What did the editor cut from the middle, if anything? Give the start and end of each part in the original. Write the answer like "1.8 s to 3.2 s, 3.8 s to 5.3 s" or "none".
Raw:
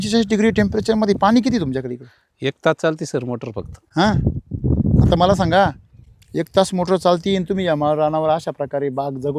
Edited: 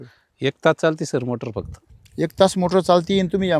3.7 s to 5.9 s